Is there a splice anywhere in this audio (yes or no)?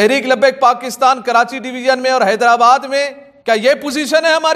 no